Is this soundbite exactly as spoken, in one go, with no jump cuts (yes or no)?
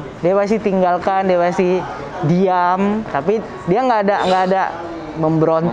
yes